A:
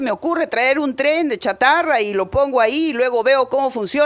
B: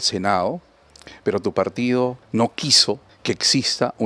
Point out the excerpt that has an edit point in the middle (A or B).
B